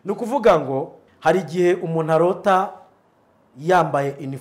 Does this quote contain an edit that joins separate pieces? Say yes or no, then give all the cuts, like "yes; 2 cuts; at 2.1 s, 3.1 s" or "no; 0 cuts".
yes; 1 cut; at 1.0 s